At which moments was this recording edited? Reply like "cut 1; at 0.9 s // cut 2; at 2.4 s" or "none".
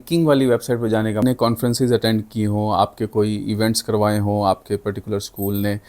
cut 1; at 1.2 s